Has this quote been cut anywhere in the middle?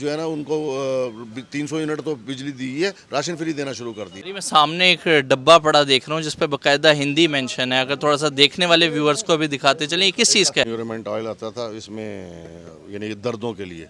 yes; 2 cuts; at 4.2 s, 10.7 s

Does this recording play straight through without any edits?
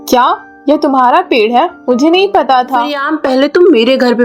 no; 1 cut; at 3.0 s

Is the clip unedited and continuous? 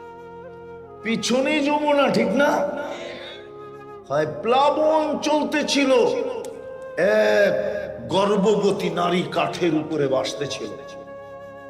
no; 2 cuts; at 1.0 s, 10.8 s

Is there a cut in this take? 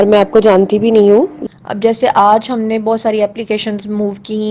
yes; 1 cut; at 1.4 s

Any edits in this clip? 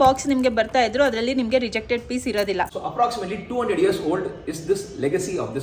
yes; 1 cut; at 2.8 s

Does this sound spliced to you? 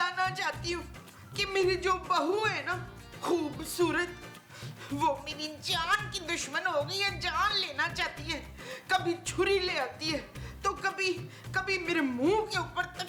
no; 0 cuts

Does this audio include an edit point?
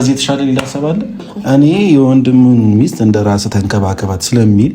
yes; 1 cut; at 1.3 s

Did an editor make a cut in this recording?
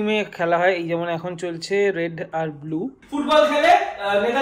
yes; 1 cut; at 3.0 s

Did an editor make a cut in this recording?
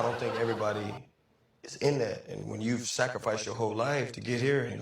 no; 0 cuts

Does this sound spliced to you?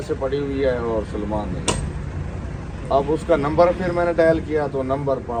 no; 0 cuts

